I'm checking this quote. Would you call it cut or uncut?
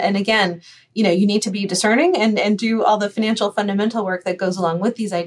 cut